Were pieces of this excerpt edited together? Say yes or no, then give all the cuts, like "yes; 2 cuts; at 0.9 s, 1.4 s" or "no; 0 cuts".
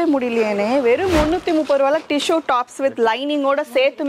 no; 0 cuts